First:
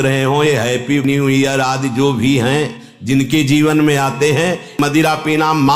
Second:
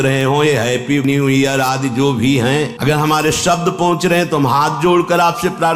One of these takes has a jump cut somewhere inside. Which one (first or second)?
second